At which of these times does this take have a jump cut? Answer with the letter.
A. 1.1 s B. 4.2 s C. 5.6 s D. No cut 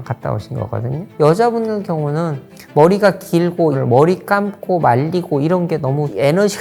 A